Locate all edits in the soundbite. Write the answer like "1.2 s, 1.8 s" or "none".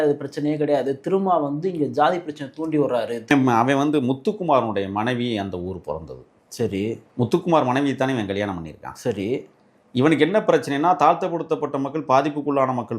3.3 s